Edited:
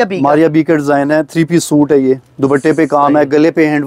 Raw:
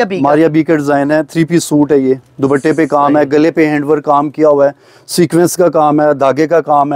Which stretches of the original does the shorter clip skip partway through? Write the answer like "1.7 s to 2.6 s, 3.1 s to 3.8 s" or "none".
none